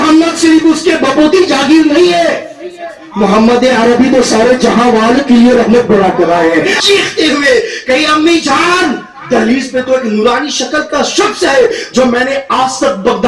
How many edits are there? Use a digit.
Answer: 1